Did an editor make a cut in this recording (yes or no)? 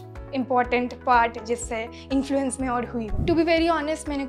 yes